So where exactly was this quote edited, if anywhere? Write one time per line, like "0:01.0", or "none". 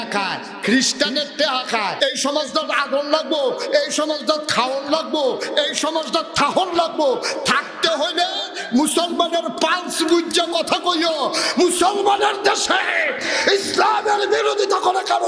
0:02.0